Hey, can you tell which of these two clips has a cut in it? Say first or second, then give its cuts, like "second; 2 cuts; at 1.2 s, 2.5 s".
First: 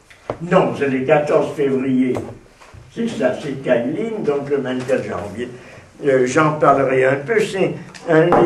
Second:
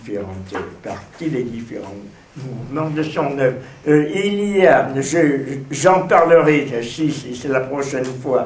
second; 1 cut; at 1.2 s